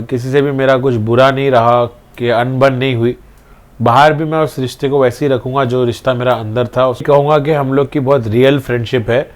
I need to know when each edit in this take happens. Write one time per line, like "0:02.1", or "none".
0:07.0